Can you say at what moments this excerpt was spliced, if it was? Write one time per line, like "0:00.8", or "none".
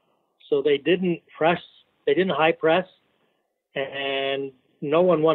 none

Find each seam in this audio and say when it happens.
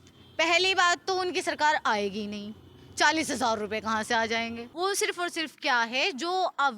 0:04.6

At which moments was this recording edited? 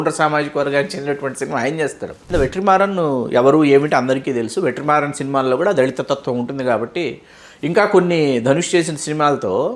0:02.3

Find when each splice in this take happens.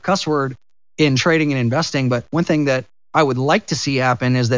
none

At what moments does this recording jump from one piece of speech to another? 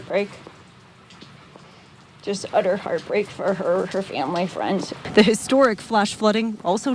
none

